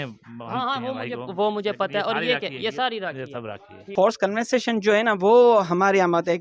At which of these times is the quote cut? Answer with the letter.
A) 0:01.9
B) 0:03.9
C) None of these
B